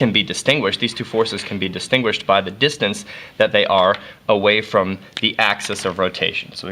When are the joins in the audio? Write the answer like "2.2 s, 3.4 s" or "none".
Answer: 4.8 s